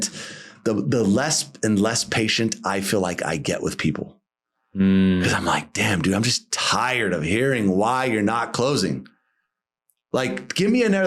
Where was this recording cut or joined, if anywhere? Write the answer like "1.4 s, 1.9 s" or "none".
none